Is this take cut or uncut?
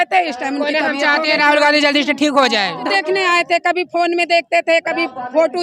cut